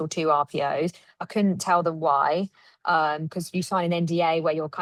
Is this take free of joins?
yes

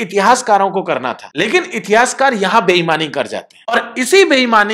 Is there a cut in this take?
yes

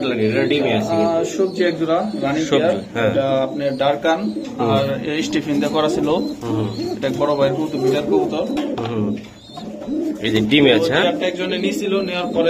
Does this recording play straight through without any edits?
yes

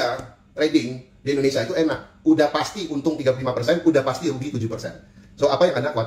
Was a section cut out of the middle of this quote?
no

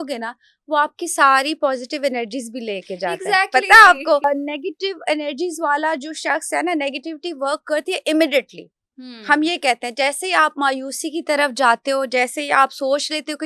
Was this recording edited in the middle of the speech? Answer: yes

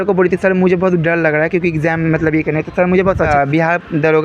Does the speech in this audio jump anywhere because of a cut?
yes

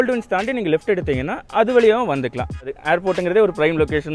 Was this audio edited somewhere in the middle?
yes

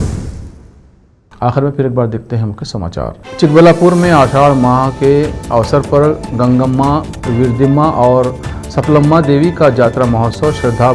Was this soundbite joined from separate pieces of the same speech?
no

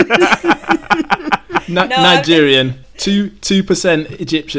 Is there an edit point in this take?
yes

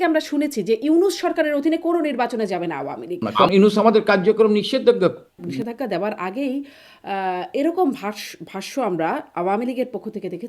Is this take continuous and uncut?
no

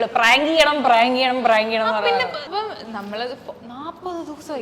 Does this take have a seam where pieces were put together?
yes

